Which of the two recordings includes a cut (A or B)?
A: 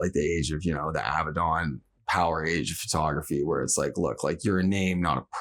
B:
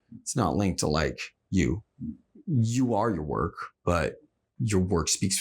B